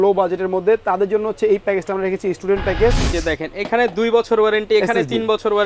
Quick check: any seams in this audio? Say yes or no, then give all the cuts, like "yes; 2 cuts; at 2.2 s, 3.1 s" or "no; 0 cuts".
yes; 1 cut; at 3.1 s